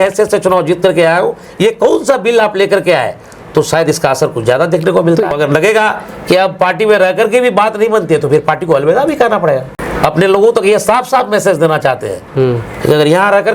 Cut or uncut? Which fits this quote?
cut